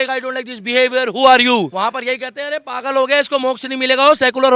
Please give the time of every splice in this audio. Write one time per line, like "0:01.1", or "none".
none